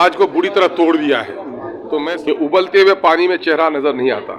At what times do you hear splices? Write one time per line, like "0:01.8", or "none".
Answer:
0:01.9